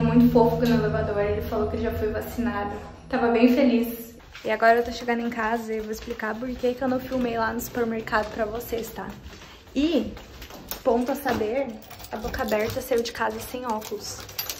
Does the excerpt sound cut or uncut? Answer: uncut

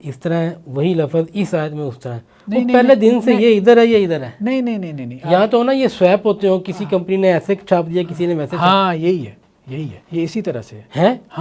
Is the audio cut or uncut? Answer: cut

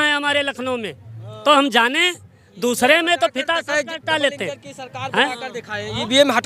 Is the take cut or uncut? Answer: uncut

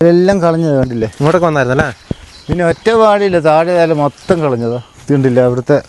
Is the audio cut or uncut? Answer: cut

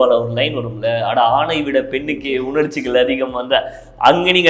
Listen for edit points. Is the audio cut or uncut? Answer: uncut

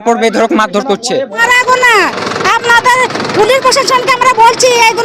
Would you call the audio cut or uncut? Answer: cut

